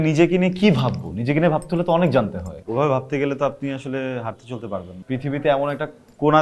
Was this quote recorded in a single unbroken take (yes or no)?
no